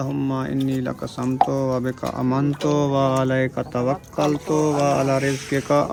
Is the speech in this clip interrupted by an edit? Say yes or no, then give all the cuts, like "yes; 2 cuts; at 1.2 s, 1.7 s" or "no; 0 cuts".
no; 0 cuts